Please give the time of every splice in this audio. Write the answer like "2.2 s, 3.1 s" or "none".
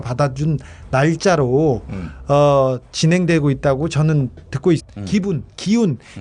none